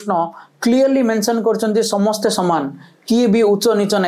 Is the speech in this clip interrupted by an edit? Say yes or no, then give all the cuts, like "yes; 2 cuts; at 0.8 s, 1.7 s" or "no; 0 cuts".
no; 0 cuts